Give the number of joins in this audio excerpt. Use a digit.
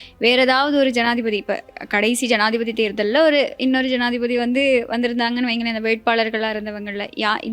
0